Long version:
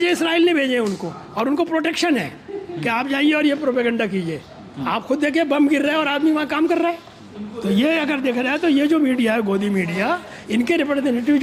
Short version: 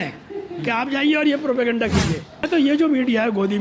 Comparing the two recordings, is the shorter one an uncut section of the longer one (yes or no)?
no